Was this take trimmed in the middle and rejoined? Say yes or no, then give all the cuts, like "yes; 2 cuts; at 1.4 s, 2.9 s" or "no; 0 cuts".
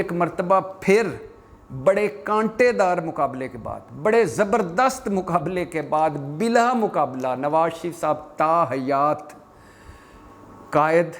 no; 0 cuts